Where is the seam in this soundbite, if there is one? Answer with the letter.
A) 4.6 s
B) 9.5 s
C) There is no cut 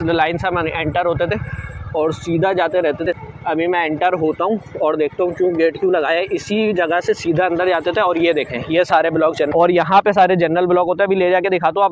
B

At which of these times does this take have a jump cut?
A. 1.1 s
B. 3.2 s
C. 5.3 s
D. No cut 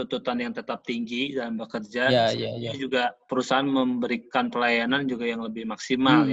B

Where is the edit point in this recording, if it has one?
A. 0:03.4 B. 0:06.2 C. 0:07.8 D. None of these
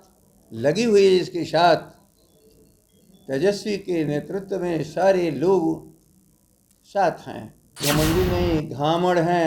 C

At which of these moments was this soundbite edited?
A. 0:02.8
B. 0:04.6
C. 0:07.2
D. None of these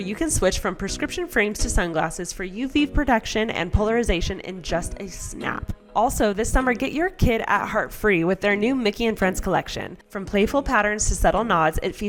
D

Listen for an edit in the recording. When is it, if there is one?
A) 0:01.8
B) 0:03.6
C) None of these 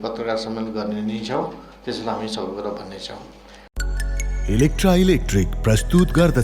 B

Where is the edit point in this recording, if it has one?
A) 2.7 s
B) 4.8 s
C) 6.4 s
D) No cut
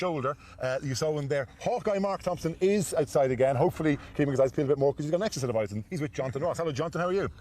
B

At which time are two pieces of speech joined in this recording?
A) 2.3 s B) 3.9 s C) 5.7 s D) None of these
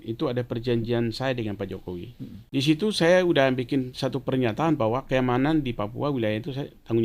A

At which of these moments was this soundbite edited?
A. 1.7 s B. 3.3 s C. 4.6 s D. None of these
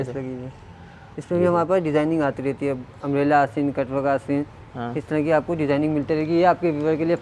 D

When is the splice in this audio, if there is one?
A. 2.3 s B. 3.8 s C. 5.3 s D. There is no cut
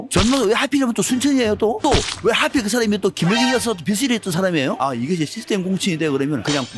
D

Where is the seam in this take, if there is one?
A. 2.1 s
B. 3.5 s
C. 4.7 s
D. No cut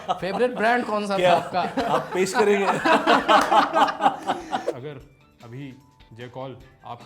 C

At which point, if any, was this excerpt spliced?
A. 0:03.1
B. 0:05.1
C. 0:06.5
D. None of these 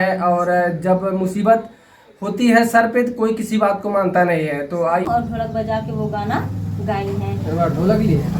B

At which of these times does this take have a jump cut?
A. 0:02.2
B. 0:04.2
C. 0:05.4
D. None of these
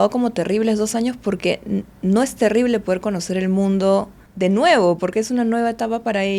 B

